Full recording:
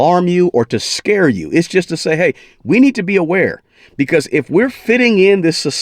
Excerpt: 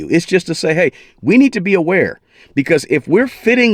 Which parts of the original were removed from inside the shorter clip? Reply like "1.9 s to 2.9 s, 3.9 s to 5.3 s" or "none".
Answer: none